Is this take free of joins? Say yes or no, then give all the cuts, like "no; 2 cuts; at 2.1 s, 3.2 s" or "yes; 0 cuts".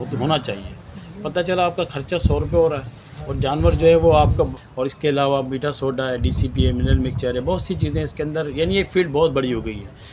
no; 1 cut; at 4.6 s